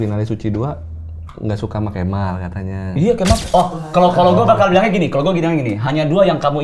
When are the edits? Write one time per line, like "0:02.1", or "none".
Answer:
0:03.4